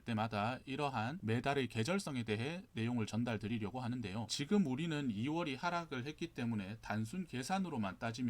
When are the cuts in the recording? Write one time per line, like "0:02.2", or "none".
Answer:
0:04.2

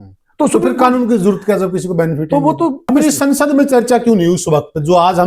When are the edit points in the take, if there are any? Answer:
0:02.8

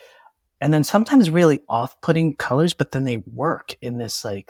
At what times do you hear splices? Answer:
none

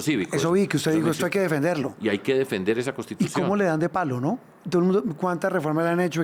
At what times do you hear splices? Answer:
none

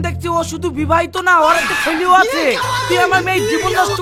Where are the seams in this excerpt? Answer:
none

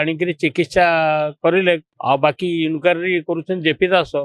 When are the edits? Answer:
0:01.9

